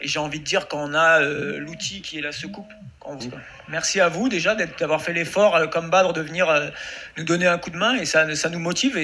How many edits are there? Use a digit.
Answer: 1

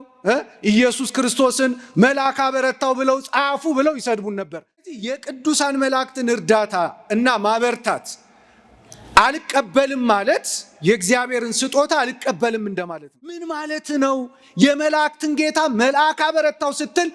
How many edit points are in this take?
2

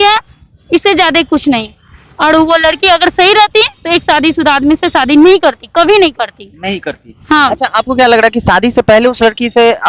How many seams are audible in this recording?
0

